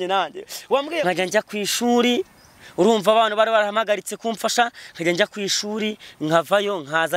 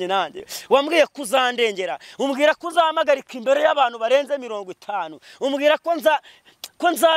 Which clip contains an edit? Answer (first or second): first